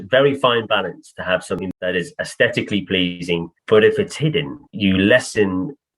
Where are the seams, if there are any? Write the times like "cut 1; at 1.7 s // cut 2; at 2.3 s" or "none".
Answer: cut 1; at 1.6 s // cut 2; at 3.5 s // cut 3; at 4.6 s